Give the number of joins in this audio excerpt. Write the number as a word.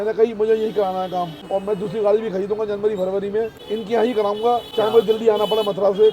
three